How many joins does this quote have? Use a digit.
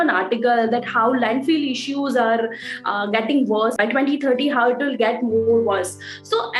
1